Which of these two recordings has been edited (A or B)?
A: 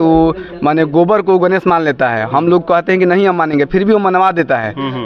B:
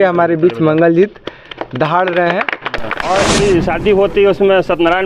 B